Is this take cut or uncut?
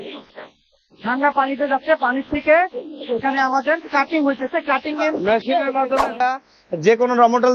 cut